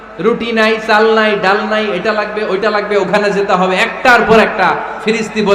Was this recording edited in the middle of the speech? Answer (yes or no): no